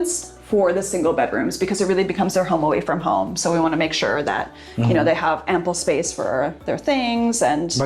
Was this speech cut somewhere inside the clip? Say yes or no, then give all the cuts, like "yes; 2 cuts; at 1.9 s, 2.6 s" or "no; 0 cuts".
no; 0 cuts